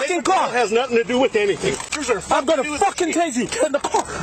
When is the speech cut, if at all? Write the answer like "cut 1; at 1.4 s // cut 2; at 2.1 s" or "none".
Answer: cut 1; at 2.0 s